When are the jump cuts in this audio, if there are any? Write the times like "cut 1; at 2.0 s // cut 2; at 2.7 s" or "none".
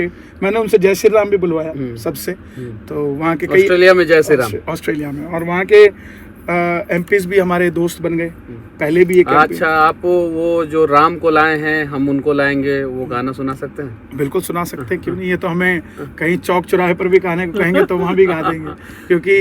none